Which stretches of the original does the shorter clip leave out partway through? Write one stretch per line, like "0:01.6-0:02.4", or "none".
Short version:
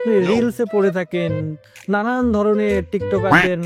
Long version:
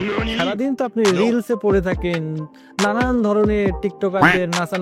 none